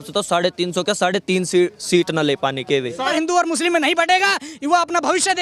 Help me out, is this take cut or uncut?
cut